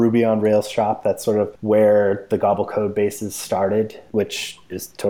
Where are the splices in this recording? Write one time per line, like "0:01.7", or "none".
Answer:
0:01.6
0:04.0

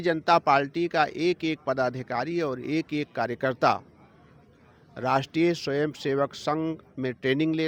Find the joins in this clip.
none

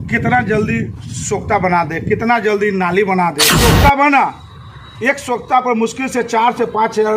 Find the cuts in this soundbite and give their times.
0:03.5

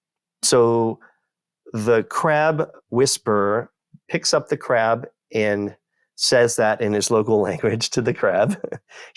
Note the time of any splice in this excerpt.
0:04.1

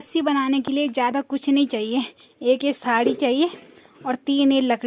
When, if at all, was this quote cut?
none

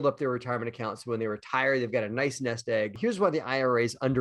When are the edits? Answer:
0:02.9

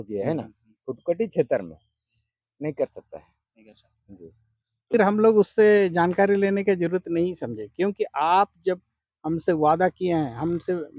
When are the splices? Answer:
0:04.9

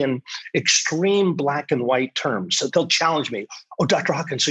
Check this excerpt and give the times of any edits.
0:02.7

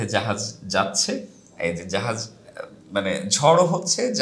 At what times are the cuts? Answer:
none

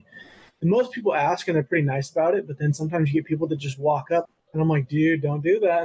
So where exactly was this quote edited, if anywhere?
0:04.3

